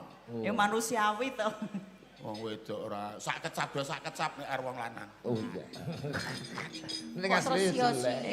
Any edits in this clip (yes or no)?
yes